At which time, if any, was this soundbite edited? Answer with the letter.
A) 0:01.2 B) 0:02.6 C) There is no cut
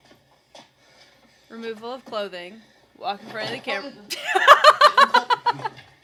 C